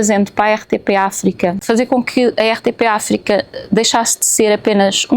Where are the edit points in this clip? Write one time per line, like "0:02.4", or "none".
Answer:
0:01.6